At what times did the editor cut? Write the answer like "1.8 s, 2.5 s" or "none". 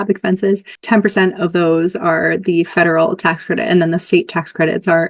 none